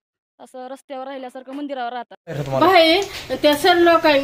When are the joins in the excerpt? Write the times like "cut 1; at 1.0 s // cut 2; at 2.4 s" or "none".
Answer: cut 1; at 2.4 s